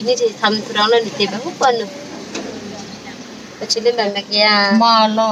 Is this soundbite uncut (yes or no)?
yes